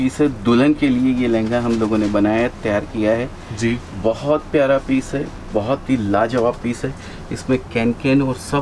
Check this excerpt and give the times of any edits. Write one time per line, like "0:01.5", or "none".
none